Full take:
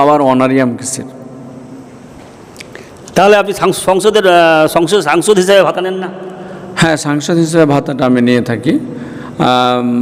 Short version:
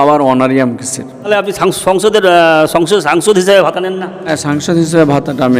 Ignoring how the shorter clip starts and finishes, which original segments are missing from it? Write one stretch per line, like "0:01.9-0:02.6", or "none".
0:01.3-0:03.3
0:06.3-0:06.9